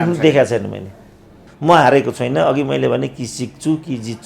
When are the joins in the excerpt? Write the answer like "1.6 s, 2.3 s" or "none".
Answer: 1.5 s